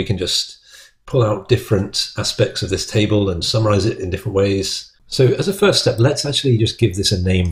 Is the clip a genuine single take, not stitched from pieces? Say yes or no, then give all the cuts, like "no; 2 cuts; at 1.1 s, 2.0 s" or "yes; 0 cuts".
yes; 0 cuts